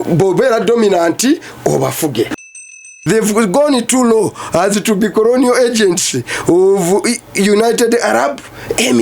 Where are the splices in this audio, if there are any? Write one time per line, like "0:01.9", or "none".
0:02.8